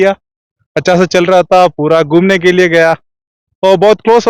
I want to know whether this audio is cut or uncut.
uncut